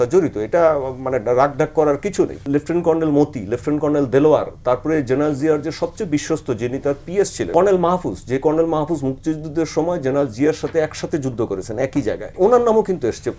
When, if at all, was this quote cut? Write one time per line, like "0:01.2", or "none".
0:02.4
0:07.5
0:12.3

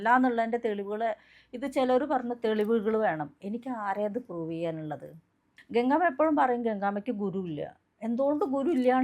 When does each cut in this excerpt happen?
0:05.5

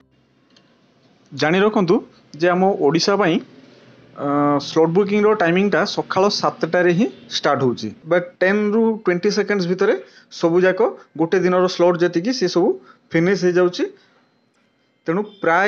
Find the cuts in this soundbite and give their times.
0:08.3

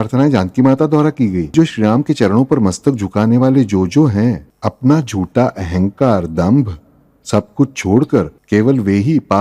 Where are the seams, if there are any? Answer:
0:01.5
0:04.5
0:08.4

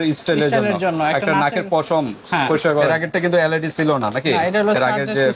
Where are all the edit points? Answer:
0:02.9

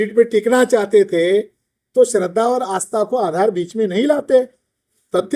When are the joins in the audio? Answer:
none

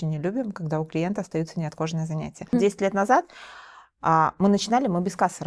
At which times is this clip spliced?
0:02.4

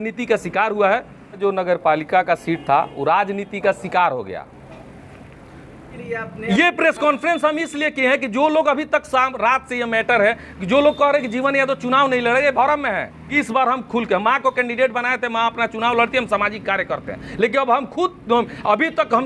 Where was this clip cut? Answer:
0:01.4
0:05.9
0:13.4

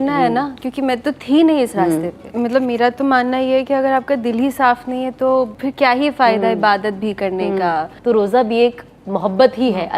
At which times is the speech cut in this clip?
0:02.2
0:05.6
0:07.9

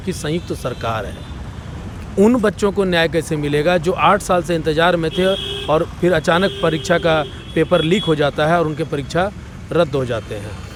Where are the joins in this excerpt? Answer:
none

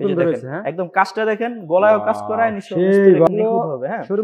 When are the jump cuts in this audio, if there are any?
0:03.3

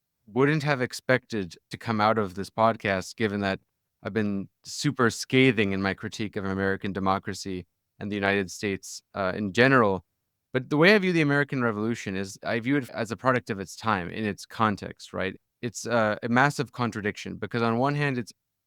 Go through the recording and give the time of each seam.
0:15.4

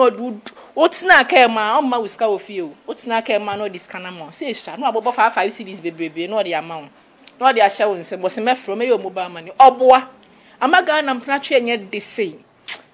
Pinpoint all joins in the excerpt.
none

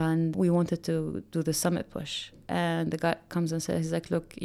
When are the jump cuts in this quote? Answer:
none

